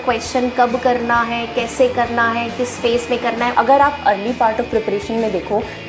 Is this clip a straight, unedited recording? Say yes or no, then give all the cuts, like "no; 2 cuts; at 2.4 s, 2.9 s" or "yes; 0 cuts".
no; 1 cut; at 3.5 s